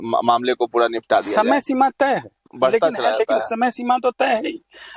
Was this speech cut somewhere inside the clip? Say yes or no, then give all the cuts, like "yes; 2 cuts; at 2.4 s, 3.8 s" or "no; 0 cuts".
yes; 1 cut; at 2.5 s